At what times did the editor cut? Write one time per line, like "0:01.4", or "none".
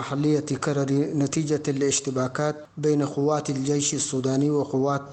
0:02.7